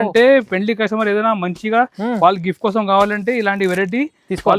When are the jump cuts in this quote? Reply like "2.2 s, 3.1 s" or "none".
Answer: none